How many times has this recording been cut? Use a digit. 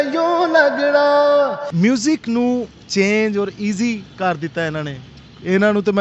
1